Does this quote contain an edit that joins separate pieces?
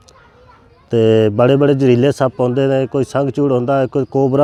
no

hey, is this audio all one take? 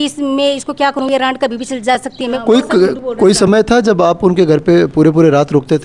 no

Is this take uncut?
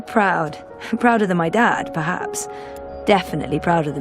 yes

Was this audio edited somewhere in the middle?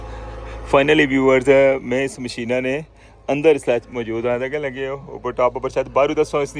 no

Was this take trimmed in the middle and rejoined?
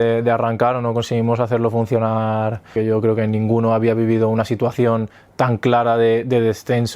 yes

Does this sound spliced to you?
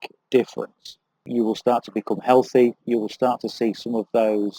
yes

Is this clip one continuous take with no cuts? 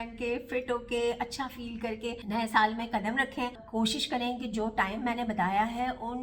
no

